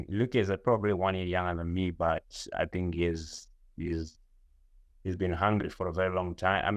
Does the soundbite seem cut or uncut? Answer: uncut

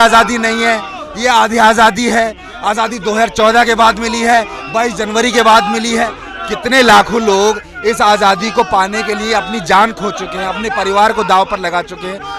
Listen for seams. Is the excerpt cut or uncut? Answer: uncut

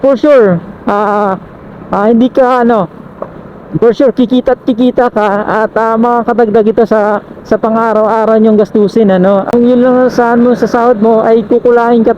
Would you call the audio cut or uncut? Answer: uncut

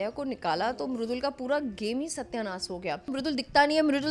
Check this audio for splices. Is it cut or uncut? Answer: cut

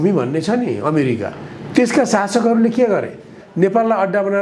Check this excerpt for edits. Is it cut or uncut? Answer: cut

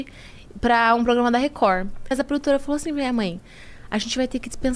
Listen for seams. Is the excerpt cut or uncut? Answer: cut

